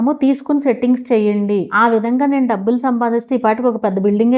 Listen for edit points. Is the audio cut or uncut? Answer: cut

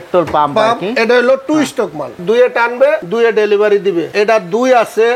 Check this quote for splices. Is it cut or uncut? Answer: cut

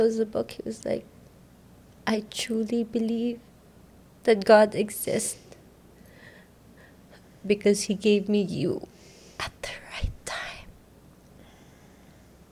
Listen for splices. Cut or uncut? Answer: uncut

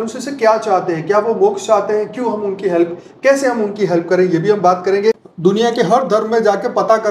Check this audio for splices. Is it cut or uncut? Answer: cut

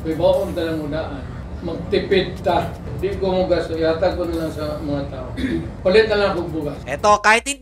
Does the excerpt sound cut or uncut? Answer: uncut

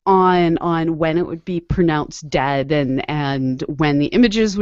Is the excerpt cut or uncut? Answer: cut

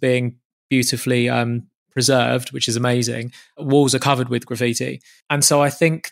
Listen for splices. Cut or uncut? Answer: cut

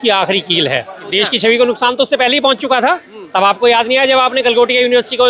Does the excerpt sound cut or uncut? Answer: cut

